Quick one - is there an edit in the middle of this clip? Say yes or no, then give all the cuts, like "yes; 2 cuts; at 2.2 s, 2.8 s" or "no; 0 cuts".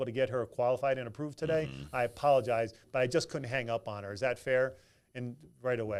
no; 0 cuts